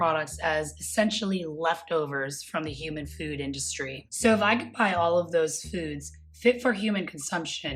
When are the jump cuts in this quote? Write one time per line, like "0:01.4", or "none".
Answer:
0:04.0